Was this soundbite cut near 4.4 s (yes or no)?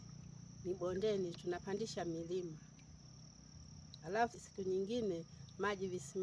yes